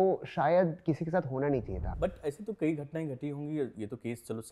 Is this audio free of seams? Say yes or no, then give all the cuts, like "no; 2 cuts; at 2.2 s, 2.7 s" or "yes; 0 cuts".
no; 1 cut; at 1.8 s